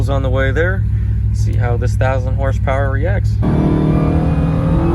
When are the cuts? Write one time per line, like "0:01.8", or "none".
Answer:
0:03.4